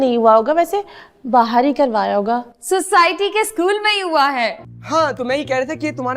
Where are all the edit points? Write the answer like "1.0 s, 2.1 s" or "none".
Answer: 4.7 s